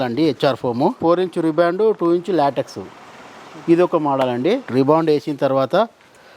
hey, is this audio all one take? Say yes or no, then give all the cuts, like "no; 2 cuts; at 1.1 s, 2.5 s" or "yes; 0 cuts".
no; 2 cuts; at 1.0 s, 4.7 s